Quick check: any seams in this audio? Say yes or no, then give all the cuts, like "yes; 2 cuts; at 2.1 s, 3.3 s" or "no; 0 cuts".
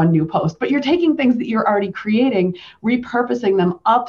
no; 0 cuts